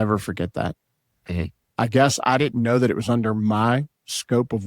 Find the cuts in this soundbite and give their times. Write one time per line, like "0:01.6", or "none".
0:01.6